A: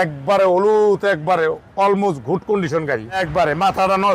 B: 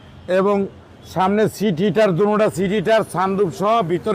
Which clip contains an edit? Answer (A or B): A